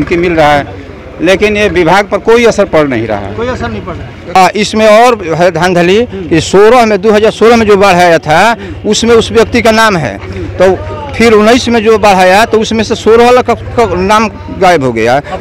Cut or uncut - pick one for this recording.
cut